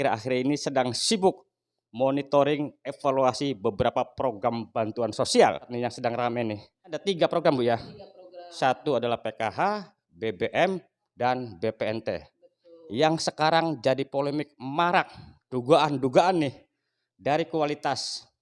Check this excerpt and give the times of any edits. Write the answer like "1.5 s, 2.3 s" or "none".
5.7 s, 7.0 s